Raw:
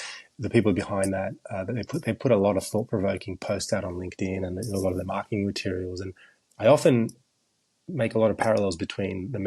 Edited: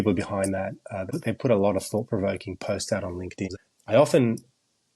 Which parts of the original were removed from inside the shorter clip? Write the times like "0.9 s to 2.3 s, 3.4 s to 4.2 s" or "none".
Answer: 1.7 s to 1.9 s, 4.3 s to 6.2 s